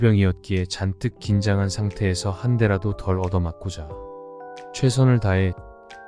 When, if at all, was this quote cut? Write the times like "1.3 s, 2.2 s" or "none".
none